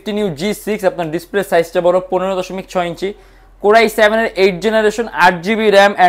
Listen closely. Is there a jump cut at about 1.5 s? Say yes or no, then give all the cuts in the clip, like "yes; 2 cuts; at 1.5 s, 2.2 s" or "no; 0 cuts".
no; 0 cuts